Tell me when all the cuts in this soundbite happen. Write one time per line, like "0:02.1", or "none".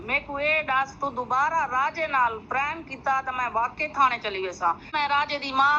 0:04.9